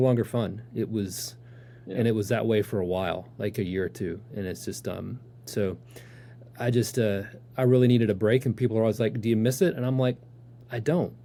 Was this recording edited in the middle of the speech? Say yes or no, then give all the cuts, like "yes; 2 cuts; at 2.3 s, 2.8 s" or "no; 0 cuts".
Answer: no; 0 cuts